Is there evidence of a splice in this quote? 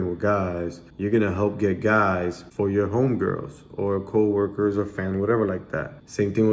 no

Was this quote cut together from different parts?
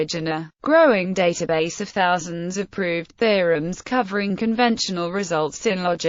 no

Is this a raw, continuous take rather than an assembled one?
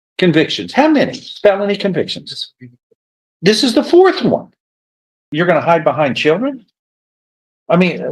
no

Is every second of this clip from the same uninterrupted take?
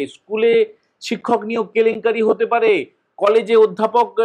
yes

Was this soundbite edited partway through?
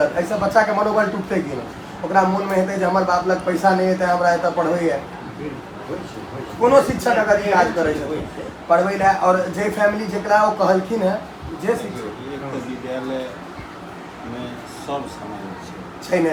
no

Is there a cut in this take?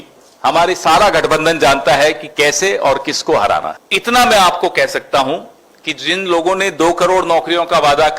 yes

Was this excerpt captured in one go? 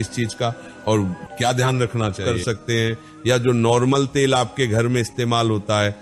no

